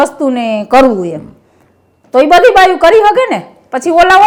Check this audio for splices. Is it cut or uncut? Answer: uncut